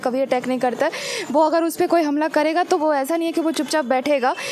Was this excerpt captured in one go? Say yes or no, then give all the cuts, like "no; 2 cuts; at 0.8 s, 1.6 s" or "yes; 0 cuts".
yes; 0 cuts